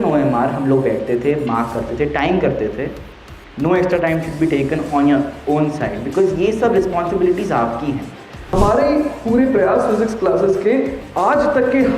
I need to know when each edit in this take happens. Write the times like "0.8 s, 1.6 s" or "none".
8.5 s